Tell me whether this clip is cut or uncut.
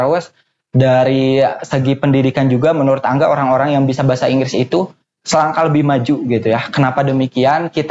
uncut